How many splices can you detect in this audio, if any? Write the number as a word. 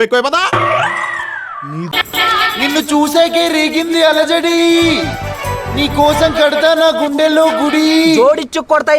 one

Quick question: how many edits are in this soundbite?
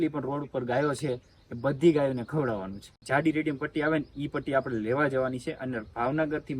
one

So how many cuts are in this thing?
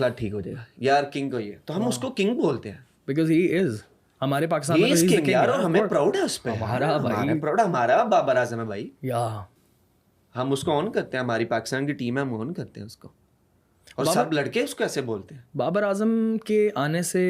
zero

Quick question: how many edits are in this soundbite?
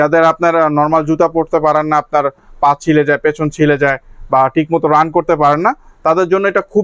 zero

